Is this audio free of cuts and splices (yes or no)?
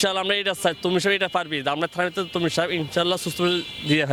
yes